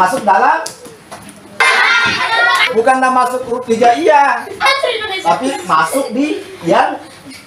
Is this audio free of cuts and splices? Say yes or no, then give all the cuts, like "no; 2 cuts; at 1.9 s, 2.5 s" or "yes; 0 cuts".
no; 2 cuts; at 1.6 s, 2.7 s